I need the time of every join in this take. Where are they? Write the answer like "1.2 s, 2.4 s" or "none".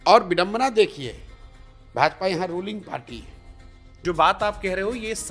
3.9 s